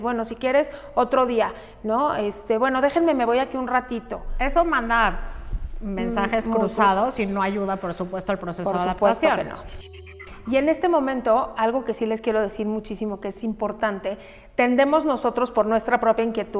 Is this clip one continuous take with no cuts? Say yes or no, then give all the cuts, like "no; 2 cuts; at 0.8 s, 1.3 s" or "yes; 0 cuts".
no; 1 cut; at 10.0 s